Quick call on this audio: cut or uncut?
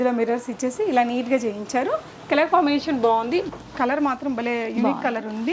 cut